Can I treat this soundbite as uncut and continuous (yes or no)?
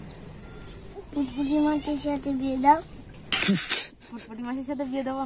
no